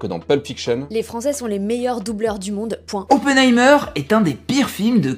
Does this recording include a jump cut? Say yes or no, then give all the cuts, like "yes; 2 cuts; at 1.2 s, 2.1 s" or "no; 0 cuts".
yes; 2 cuts; at 1.1 s, 3.4 s